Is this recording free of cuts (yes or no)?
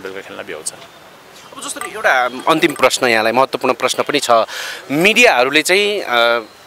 yes